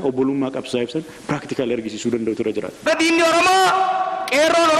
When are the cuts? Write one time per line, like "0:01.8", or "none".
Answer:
0:02.9